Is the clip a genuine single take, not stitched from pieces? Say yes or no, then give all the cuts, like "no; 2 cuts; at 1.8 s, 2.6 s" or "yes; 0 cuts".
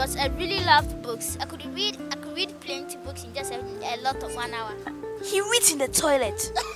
yes; 0 cuts